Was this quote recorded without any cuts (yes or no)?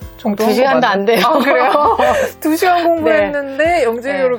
yes